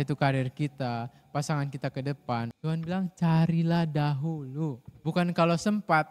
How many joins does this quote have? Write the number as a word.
two